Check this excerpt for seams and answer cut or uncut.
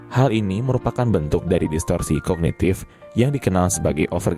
uncut